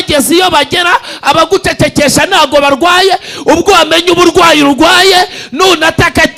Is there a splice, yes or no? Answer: no